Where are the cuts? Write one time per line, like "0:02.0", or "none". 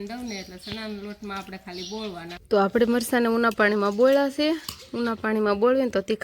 0:02.3